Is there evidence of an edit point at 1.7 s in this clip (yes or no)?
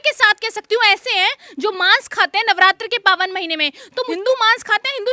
no